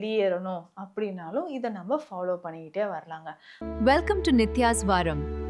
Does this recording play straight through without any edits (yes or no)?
no